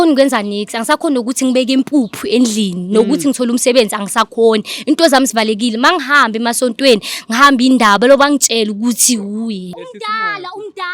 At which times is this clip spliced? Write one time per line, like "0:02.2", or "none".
0:09.7